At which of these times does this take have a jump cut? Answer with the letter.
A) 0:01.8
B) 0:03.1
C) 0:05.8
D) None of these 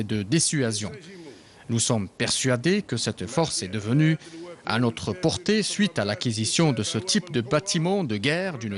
C